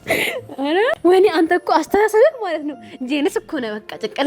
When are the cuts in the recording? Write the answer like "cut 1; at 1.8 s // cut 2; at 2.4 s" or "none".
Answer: cut 1; at 0.9 s